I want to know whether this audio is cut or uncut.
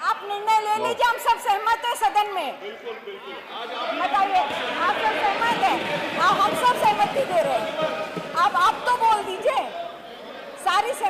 uncut